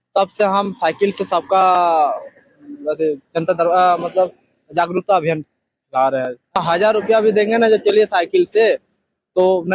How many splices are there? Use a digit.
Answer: 1